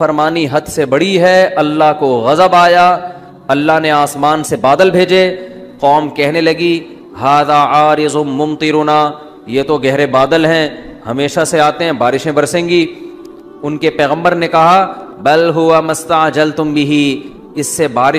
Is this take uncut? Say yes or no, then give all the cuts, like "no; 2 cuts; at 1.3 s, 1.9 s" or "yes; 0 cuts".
yes; 0 cuts